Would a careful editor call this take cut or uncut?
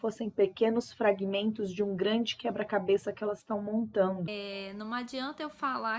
cut